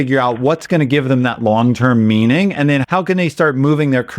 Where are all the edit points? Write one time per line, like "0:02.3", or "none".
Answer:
0:02.8